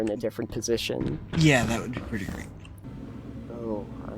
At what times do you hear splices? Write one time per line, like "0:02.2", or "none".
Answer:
0:02.8